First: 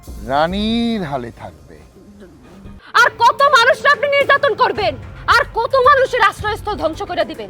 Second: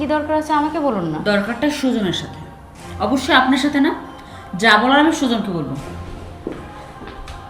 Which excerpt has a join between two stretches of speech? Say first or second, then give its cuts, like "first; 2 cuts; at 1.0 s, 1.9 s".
first; 1 cut; at 2.7 s